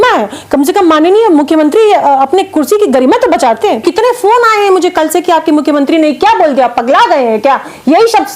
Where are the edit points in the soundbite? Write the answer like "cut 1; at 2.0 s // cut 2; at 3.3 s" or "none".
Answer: cut 1; at 3.8 s

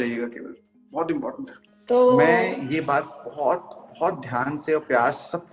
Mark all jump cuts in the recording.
cut 1; at 1.6 s

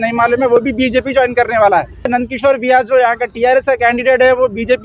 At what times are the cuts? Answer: cut 1; at 2.1 s

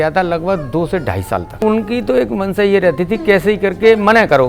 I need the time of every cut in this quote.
cut 1; at 1.6 s

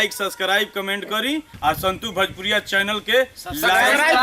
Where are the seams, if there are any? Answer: cut 1; at 1.5 s

